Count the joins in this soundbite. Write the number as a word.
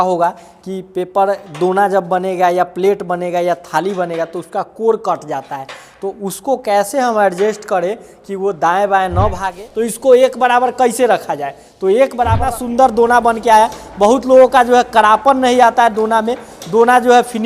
two